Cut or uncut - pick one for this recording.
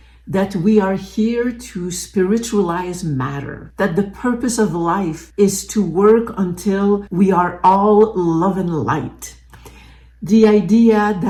uncut